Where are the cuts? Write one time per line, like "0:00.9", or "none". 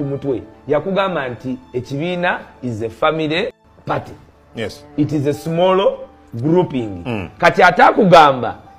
0:03.7